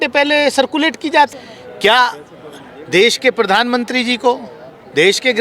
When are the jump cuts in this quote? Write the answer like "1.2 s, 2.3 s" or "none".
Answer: 1.3 s